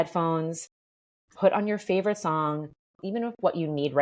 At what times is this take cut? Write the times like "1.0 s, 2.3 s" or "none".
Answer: 3.0 s